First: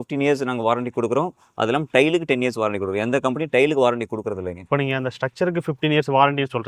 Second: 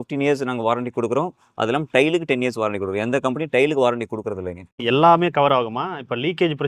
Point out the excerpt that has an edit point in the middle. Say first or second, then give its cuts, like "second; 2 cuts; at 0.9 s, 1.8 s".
second; 1 cut; at 4.8 s